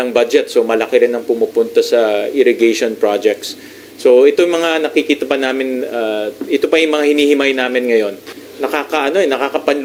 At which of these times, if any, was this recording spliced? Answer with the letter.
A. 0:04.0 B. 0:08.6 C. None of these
C